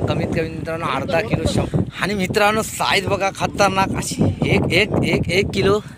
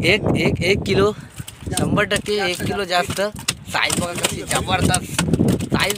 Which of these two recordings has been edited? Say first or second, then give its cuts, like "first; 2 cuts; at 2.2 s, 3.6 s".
first; 1 cut; at 1.6 s